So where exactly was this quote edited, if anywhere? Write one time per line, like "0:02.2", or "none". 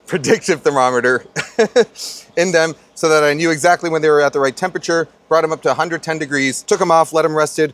none